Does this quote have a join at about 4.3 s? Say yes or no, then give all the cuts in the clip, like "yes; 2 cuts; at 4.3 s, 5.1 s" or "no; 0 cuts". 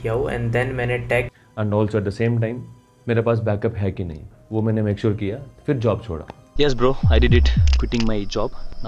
no; 1 cut; at 1.4 s